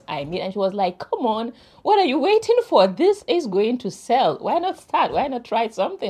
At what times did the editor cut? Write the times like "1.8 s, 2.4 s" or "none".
none